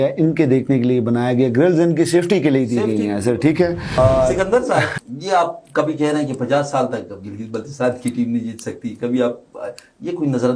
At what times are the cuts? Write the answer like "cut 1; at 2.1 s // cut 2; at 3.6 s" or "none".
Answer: cut 1; at 3.9 s // cut 2; at 5.0 s